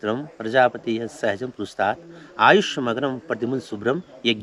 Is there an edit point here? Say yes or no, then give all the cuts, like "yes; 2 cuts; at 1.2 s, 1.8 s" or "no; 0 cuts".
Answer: no; 0 cuts